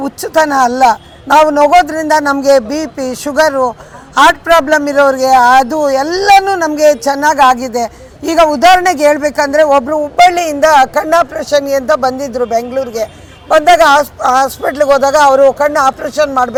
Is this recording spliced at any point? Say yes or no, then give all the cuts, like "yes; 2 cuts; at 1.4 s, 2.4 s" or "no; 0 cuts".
no; 0 cuts